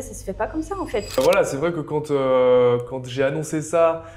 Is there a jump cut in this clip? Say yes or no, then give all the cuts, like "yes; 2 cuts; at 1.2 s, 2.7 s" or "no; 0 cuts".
yes; 1 cut; at 1.2 s